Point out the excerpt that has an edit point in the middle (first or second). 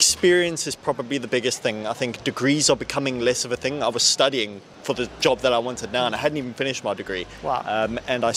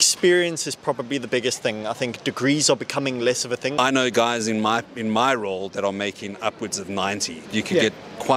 second